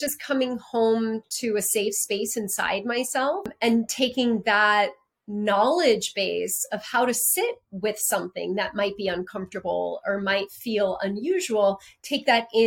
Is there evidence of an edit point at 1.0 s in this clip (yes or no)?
no